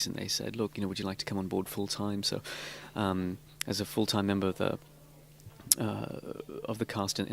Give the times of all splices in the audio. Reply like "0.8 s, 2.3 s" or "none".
4.3 s